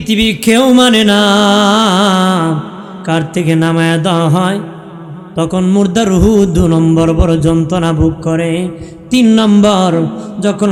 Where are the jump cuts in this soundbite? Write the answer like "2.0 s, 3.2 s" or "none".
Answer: none